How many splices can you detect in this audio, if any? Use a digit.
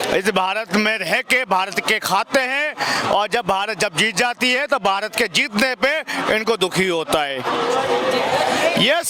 0